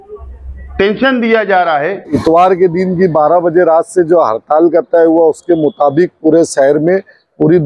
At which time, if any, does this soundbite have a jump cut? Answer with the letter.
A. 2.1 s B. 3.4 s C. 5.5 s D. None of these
A